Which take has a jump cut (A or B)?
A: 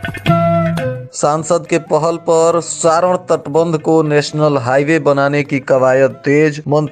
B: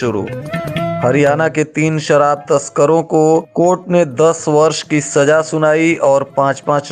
A